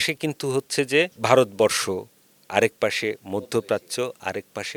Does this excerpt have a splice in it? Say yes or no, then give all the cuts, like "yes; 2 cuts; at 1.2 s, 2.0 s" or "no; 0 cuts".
no; 0 cuts